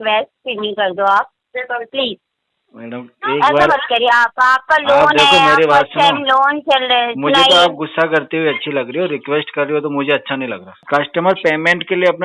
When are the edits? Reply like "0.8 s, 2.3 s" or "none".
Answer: 10.8 s